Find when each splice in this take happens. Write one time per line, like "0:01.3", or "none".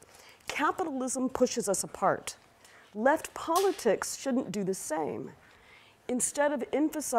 0:00.9